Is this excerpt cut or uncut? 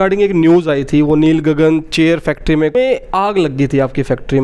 cut